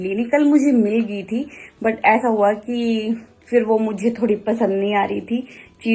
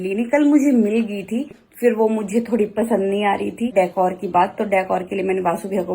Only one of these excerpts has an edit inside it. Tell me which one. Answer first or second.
second